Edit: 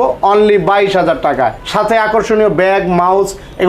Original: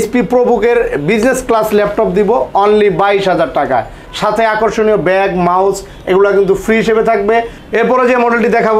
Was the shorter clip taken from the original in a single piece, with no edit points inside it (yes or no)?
no